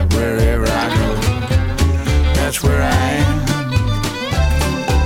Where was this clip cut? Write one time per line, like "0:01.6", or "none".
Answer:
none